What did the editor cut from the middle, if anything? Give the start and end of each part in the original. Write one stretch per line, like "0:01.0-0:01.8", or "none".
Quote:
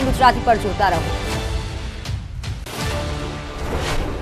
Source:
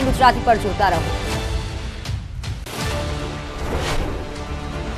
none